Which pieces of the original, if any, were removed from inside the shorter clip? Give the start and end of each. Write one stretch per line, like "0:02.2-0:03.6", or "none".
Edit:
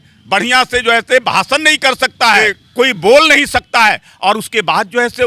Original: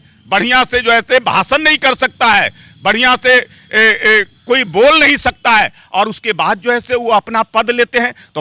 0:02.6-0:04.3